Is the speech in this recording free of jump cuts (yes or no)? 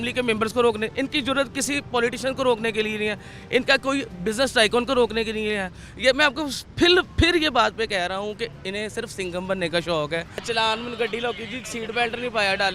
no